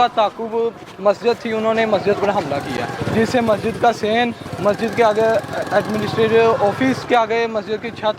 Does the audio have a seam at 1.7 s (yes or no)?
no